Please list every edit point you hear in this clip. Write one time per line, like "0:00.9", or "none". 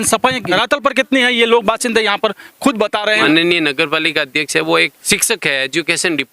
0:03.2